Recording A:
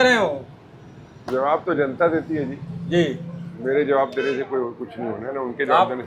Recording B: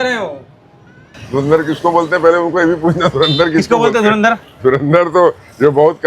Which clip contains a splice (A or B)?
B